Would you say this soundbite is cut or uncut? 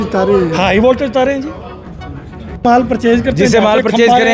cut